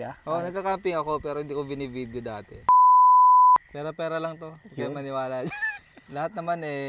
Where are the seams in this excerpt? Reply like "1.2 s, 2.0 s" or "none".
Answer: 2.7 s, 3.6 s